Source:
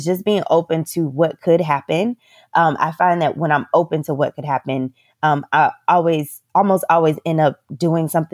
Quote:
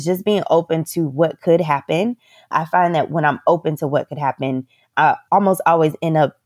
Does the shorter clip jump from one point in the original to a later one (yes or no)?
yes